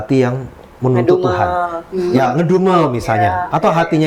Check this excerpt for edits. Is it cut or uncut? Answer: uncut